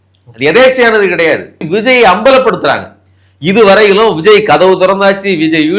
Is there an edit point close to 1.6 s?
yes; 1 cut; at 1.6 s

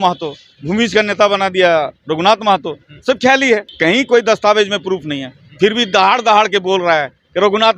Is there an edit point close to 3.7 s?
yes; 1 cut; at 3.7 s

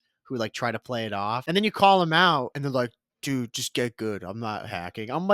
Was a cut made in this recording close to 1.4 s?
yes; 2 cuts; at 1.4 s, 2.5 s

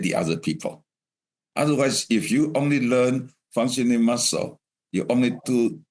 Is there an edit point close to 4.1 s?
no; 0 cuts

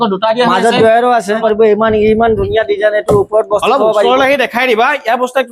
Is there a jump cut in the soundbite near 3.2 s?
no; 1 cut; at 1.4 s

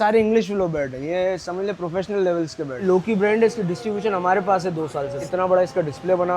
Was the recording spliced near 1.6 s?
no; 2 cuts; at 2.8 s, 5.3 s

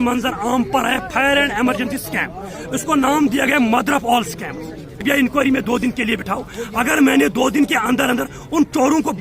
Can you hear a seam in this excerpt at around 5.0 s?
yes; 1 cut; at 5.0 s

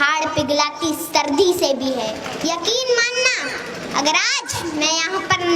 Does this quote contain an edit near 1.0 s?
no; 1 cut; at 2.3 s

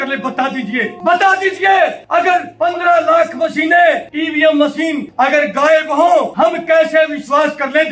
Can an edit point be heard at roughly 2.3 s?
yes; 5 cuts; at 0.9 s, 2.3 s, 4.1 s, 5.0 s, 6.3 s

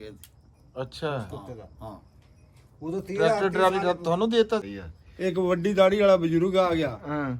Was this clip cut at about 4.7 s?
yes; 1 cut; at 4.7 s

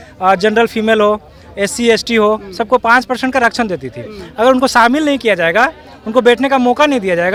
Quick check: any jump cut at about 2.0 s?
no; 0 cuts

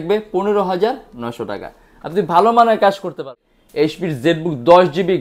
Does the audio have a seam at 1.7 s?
no; 1 cut; at 3.1 s

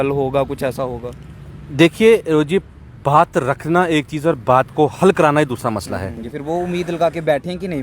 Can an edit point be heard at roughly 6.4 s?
yes; 1 cut; at 6.4 s

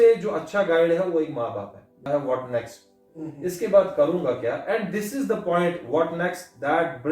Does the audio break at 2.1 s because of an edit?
yes; 1 cut; at 2.1 s

